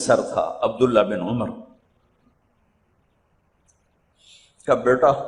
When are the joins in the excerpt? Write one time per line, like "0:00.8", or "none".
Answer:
none